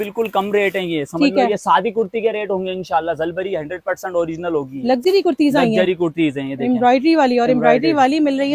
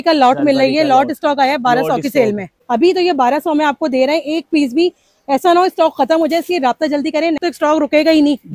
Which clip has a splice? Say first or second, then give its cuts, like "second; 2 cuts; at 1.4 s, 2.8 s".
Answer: second; 2 cuts; at 2.5 s, 7.4 s